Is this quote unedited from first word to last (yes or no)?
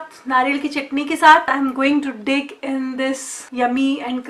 no